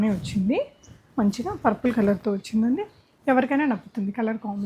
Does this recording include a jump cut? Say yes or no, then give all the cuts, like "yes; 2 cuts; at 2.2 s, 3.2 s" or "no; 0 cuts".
no; 0 cuts